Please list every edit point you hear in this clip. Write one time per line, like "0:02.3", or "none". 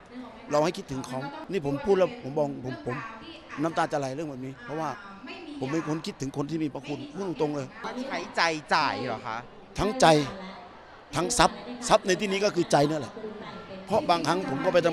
0:01.4
0:07.8